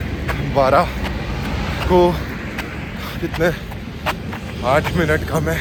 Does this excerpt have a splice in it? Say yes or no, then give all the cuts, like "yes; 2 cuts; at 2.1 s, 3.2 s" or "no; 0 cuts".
no; 0 cuts